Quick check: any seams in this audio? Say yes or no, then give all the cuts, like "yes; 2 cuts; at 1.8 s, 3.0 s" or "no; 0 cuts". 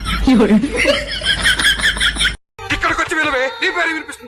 yes; 1 cut; at 2.5 s